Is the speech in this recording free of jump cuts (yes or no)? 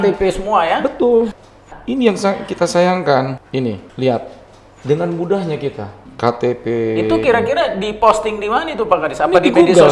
yes